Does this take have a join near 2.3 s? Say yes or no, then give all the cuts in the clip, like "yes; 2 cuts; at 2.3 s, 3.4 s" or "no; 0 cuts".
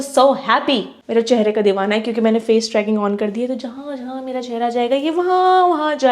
no; 1 cut; at 1.0 s